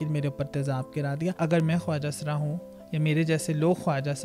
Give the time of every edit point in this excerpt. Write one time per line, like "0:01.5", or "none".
0:01.4